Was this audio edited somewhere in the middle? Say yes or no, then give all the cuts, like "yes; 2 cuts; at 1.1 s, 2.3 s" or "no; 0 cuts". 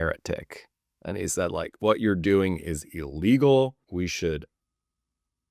yes; 1 cut; at 3.8 s